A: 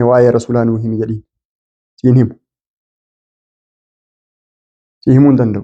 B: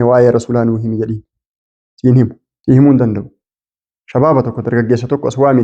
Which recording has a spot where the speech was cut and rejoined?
B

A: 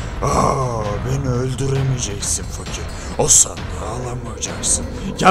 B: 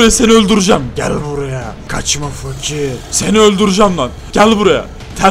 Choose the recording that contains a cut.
B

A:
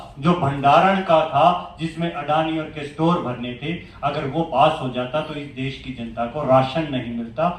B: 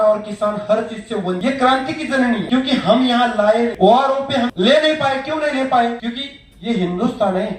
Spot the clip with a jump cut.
B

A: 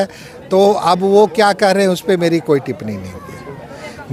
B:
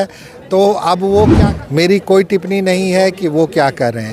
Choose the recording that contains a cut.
B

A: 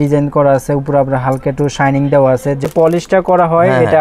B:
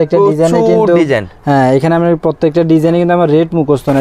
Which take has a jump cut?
A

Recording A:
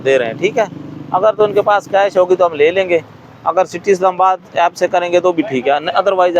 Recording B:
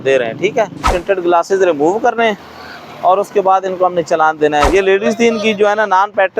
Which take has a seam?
B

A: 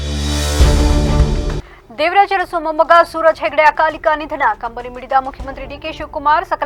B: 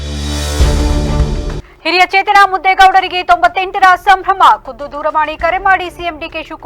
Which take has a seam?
B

